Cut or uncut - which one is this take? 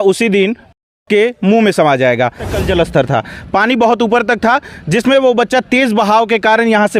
cut